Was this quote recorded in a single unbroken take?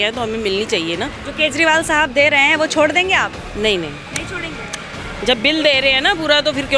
no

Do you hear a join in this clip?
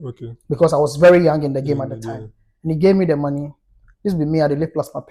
no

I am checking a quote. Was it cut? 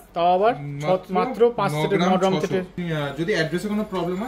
yes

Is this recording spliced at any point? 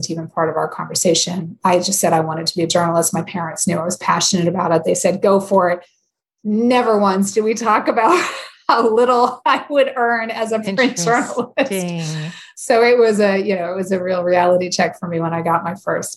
no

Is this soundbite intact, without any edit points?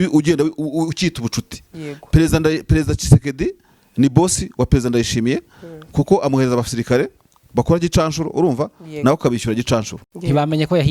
no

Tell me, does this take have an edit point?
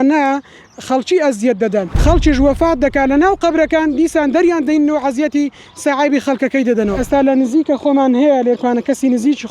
yes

